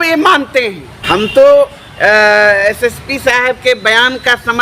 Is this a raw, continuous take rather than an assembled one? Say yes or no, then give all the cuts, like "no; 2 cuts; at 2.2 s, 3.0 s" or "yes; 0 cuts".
no; 1 cut; at 0.9 s